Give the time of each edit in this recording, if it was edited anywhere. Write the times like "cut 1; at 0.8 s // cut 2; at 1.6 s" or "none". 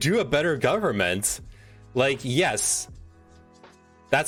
none